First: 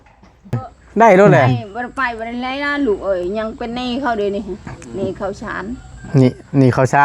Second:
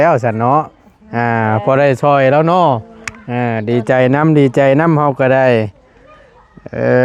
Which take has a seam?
first; 1 cut; at 1.5 s

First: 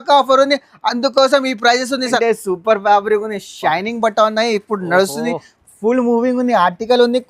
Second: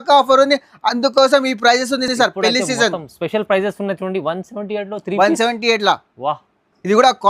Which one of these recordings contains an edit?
first; 1 cut; at 2.1 s

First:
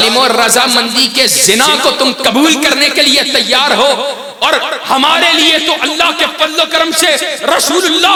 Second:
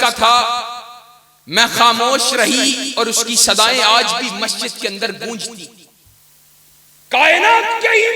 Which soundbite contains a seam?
second; 1 cut; at 5.9 s

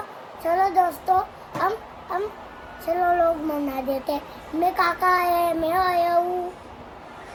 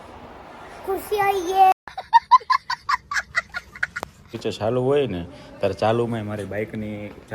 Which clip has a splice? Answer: second; 2 cuts; at 1.7 s, 4.4 s

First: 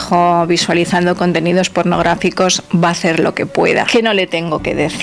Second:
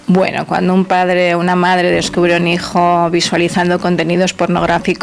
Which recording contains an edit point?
first; 1 cut; at 3.9 s

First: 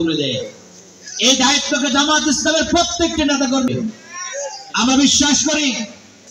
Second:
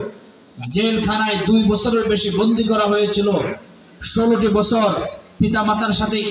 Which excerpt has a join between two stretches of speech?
first; 1 cut; at 3.7 s

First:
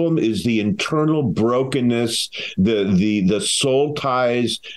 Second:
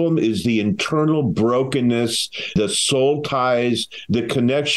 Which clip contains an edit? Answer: second; 1 cut; at 2.6 s

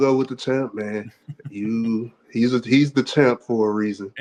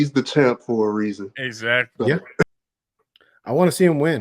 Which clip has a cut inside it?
second; 1 cut; at 2.4 s

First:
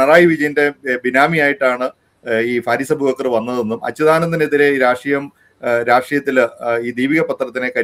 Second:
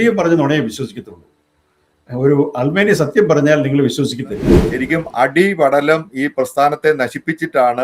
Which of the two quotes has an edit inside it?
second; 1 cut; at 4.5 s

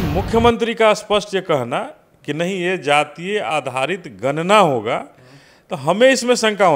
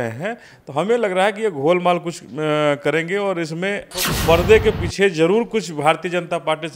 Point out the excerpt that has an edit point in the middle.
second; 1 cut; at 3.9 s

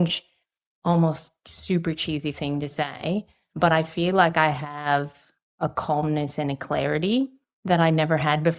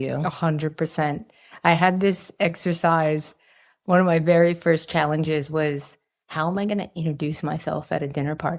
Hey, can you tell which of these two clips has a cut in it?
first; 2 cuts; at 3.4 s, 7.5 s

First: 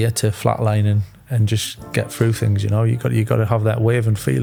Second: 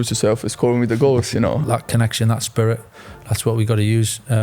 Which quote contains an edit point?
second; 1 cut; at 1.6 s

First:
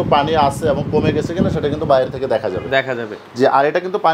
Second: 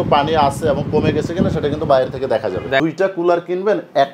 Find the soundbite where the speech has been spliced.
second; 1 cut; at 2.8 s

